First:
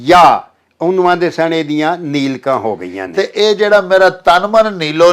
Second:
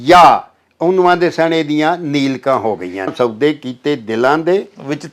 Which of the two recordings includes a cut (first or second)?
second